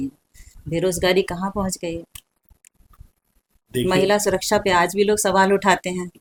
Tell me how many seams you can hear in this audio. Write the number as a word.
zero